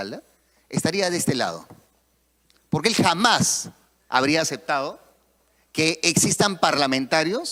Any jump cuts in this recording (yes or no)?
no